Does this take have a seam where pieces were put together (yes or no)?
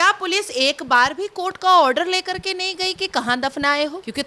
no